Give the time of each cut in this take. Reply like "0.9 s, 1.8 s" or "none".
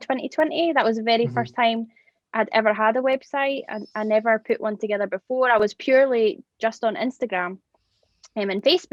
none

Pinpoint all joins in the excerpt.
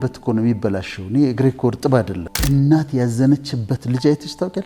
2.3 s

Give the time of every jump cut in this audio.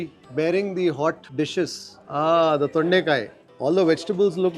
3.4 s

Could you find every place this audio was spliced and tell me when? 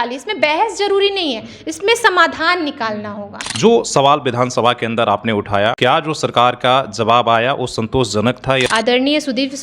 3.4 s, 5.8 s, 8.7 s

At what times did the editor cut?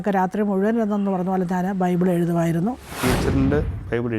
2.9 s

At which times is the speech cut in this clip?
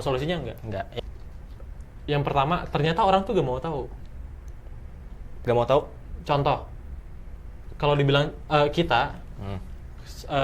1.0 s

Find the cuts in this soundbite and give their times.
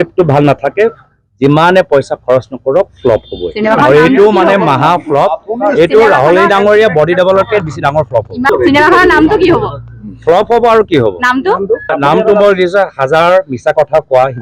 8.5 s, 11.9 s

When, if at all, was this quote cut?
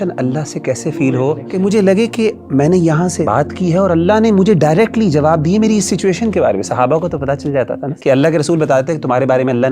1.4 s, 3.3 s, 7.9 s

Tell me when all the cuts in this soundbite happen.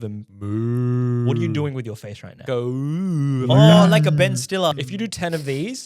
2.4 s, 4.7 s

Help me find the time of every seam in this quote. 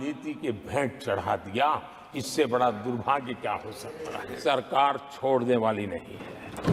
4.4 s

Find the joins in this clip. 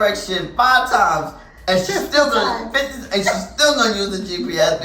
none

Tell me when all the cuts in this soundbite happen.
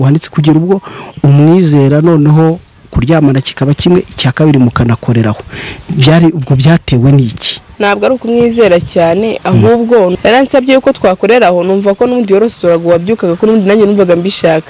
10.1 s

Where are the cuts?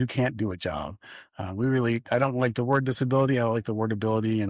none

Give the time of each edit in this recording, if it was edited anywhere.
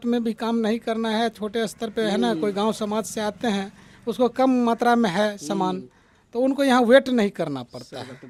none

